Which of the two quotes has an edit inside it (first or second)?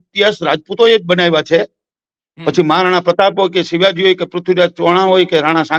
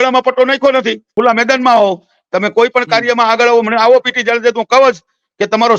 second